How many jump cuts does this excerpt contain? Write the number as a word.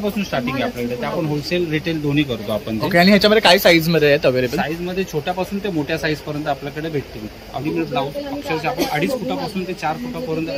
one